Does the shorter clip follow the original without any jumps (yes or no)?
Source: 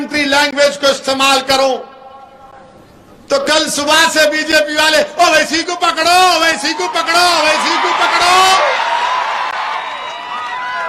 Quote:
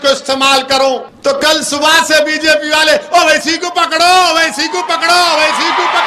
no